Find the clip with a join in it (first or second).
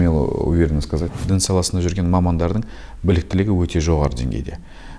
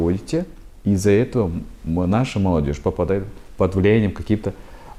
first